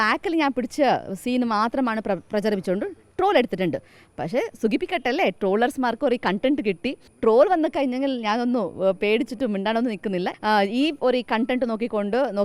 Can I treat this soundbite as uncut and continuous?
no; 2 cuts; at 7.0 s, 10.3 s

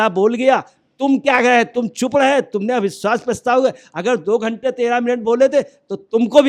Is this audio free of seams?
yes; 0 cuts

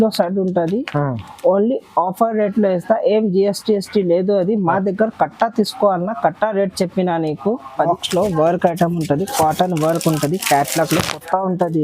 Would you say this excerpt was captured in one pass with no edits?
no; 1 cut; at 7.9 s

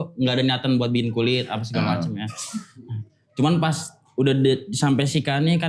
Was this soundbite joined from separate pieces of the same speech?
no; 0 cuts

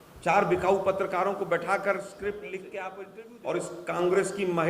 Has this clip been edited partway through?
yes; 1 cut; at 3.0 s

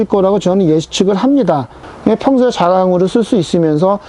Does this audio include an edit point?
yes; 1 cut; at 1.7 s

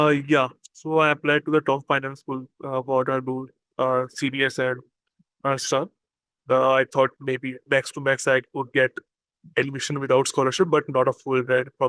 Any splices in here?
yes; 1 cut; at 6.3 s

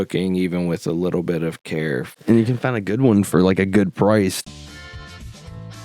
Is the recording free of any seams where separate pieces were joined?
no; 2 cuts; at 2.1 s, 4.4 s

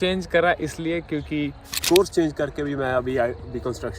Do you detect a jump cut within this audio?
yes; 1 cut; at 1.7 s

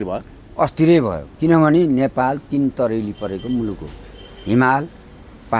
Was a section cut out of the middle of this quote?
no; 0 cuts

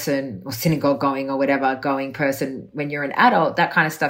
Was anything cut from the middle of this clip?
no; 0 cuts

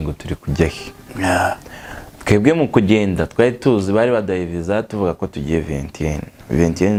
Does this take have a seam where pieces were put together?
no; 0 cuts

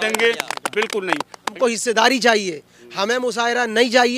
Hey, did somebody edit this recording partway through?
yes; 1 cut; at 1.4 s

